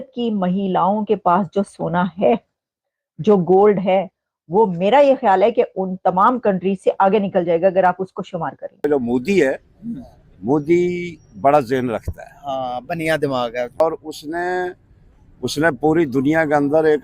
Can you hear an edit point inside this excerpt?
yes; 2 cuts; at 8.7 s, 13.8 s

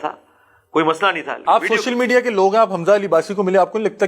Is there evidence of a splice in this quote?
yes; 1 cut; at 1.4 s

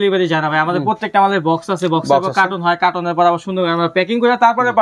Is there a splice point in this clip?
no; 0 cuts

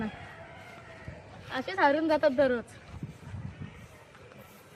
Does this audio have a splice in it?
no; 0 cuts

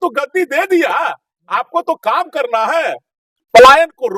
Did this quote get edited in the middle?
no; 0 cuts

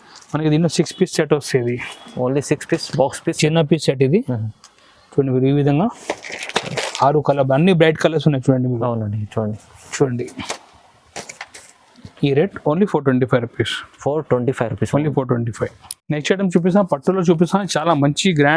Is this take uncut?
yes; 0 cuts

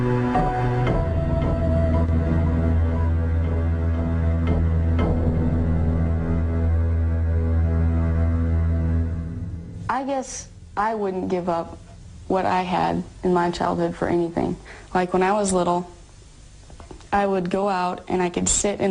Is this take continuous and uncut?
no; 1 cut; at 2.9 s

